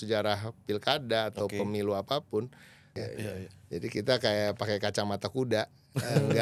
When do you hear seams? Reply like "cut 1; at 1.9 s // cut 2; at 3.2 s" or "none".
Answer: cut 1; at 3.0 s